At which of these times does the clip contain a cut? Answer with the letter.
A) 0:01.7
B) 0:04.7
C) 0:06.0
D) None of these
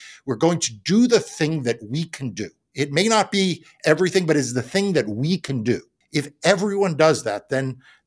C